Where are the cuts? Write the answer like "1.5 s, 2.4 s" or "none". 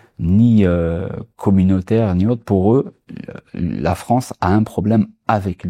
none